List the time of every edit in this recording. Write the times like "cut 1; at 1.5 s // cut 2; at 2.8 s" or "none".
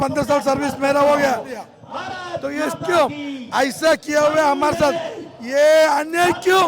cut 1; at 1.7 s